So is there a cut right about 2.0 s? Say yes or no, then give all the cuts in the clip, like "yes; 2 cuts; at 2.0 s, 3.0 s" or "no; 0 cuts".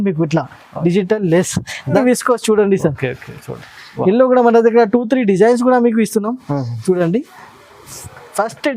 yes; 1 cut; at 2.0 s